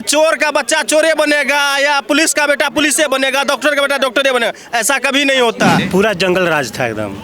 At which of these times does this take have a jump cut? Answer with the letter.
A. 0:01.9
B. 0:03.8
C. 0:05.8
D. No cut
C